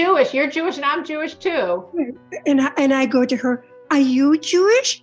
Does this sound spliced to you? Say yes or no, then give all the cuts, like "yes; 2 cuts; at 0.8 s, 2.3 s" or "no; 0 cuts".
no; 0 cuts